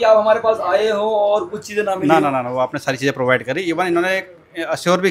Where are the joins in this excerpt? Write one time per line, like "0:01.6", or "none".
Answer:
none